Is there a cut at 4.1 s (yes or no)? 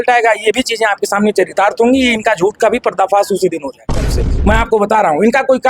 yes